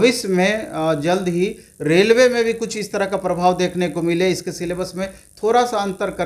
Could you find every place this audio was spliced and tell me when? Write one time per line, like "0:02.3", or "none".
none